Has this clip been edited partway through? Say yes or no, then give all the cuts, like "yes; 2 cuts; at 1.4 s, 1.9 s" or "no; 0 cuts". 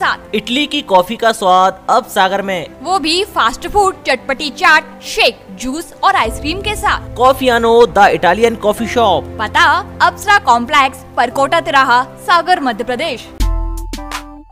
yes; 1 cut; at 13.3 s